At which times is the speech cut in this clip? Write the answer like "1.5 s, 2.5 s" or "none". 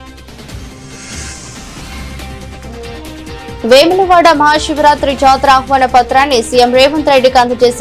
none